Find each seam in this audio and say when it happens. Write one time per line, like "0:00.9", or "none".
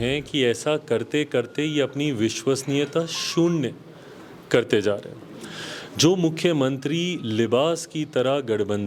none